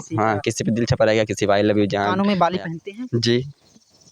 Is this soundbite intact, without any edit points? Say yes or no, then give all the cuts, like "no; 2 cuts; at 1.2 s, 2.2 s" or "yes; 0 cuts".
yes; 0 cuts